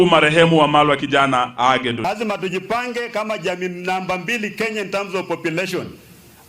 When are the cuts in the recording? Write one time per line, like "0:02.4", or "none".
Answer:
0:02.0